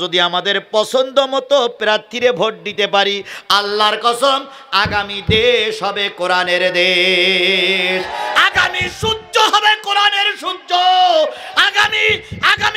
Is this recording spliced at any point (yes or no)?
no